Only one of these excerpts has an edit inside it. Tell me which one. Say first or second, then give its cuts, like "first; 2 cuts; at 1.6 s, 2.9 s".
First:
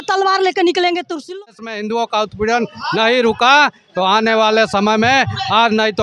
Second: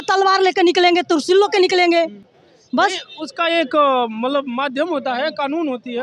first; 1 cut; at 1.3 s